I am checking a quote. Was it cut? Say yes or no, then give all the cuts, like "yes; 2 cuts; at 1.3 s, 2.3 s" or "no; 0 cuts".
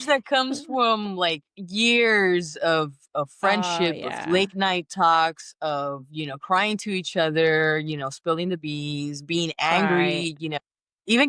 no; 0 cuts